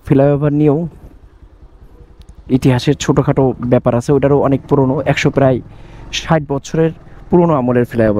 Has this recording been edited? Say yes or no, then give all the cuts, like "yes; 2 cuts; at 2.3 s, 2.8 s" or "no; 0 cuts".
no; 0 cuts